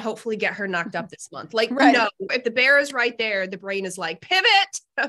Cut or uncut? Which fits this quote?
cut